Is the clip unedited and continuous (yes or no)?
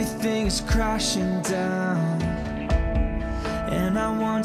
yes